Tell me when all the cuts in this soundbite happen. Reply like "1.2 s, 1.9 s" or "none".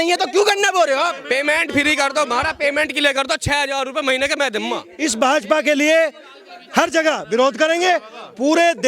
1.2 s, 4.9 s